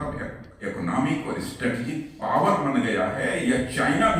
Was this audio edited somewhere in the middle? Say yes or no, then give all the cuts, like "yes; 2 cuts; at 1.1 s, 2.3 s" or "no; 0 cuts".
no; 0 cuts